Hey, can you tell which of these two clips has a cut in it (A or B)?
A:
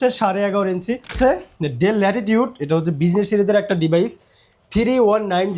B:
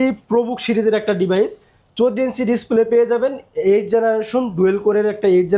A